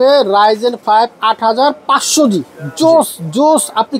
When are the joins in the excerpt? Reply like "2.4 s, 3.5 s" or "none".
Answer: none